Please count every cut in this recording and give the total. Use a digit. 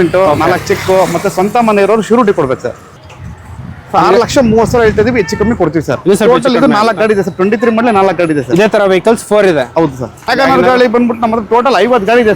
2